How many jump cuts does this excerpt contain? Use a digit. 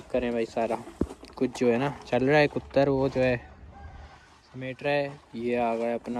0